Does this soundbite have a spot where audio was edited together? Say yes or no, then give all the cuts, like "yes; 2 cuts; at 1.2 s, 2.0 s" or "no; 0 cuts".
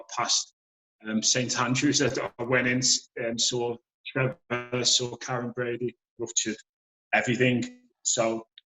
yes; 1 cut; at 6.2 s